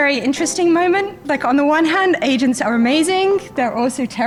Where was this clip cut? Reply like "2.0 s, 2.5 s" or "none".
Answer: none